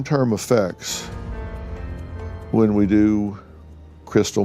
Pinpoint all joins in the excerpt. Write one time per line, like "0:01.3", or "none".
none